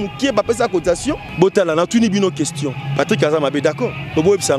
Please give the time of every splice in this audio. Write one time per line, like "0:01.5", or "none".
0:01.3